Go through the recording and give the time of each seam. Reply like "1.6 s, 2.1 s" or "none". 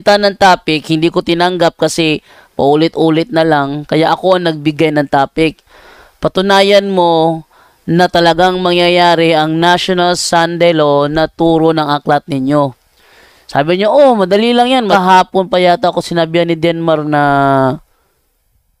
14.9 s